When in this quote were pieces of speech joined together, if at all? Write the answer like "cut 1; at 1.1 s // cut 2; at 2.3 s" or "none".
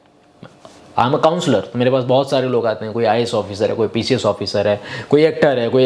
none